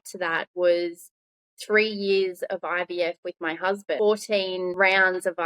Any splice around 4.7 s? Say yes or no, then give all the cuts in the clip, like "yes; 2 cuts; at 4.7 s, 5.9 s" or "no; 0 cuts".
yes; 2 cuts; at 4.0 s, 4.7 s